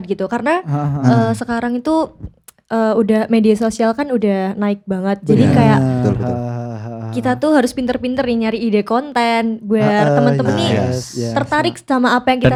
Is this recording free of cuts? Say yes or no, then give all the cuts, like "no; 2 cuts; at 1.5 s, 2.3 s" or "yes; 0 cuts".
yes; 0 cuts